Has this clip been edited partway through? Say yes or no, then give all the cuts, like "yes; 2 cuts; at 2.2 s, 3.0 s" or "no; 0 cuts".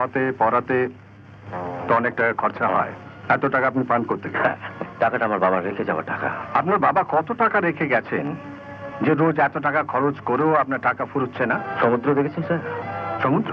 yes; 4 cuts; at 3.1 s, 4.8 s, 6.4 s, 11.7 s